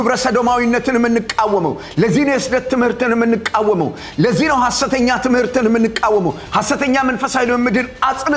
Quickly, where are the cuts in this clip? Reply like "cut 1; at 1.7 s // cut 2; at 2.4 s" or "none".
none